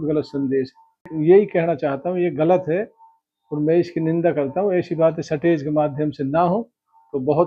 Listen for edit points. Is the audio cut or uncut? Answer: cut